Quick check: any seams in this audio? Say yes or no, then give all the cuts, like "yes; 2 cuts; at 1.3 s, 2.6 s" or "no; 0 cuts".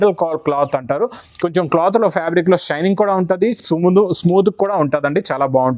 no; 0 cuts